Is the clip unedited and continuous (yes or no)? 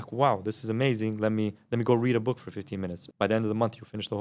no